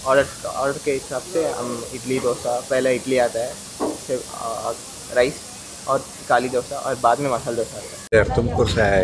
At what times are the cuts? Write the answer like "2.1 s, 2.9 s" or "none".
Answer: 8.1 s